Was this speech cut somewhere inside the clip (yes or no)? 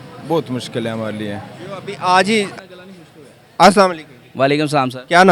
yes